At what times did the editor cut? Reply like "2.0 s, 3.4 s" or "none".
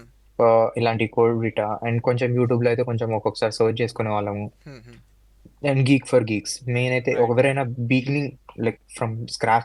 none